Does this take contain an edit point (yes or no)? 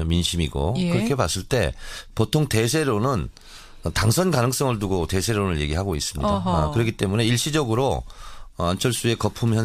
no